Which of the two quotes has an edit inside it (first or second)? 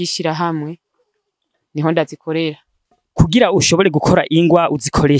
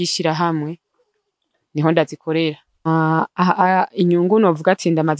second